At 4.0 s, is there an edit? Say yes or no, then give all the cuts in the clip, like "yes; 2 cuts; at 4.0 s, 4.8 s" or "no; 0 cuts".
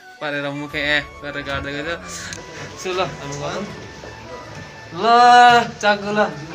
no; 1 cut; at 2.4 s